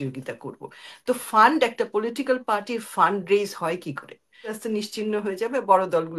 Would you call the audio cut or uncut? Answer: cut